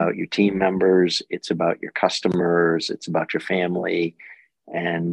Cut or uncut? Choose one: uncut